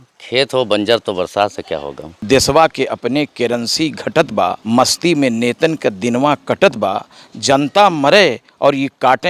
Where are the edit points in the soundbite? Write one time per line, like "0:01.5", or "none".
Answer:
0:02.2
0:04.6